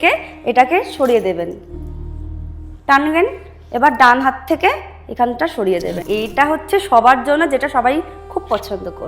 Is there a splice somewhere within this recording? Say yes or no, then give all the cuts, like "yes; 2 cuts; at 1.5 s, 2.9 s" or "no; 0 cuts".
yes; 1 cut; at 6.0 s